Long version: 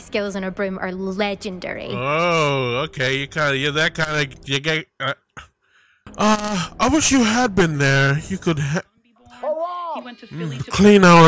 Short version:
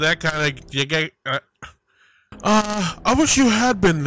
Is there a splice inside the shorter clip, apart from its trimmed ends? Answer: no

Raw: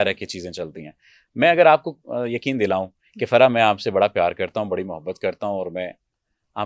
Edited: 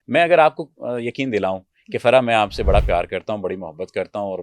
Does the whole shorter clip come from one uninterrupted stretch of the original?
yes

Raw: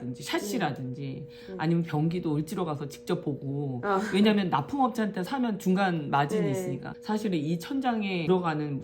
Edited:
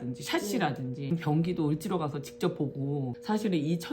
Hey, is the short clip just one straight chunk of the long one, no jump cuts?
no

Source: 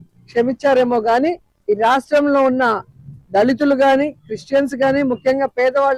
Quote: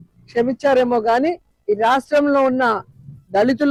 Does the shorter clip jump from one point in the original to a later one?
no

